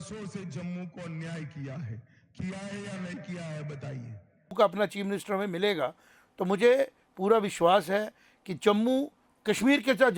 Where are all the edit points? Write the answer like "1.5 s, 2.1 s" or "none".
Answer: 4.5 s, 9.2 s